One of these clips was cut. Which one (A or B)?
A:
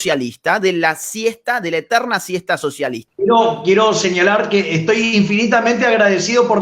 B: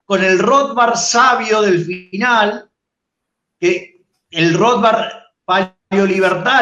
A